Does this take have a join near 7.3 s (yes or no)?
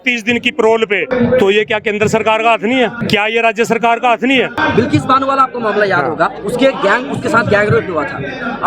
no